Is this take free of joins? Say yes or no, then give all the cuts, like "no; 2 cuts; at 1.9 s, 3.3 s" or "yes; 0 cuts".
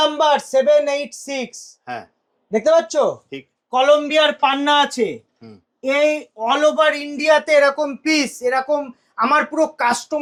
yes; 0 cuts